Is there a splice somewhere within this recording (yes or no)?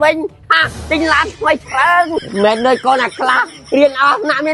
no